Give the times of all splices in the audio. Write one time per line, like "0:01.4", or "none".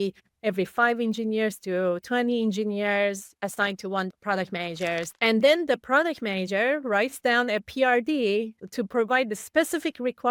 0:03.3
0:05.1